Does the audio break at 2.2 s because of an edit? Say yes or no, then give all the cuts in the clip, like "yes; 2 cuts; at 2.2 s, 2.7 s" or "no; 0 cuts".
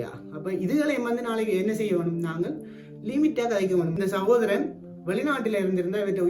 no; 1 cut; at 3.9 s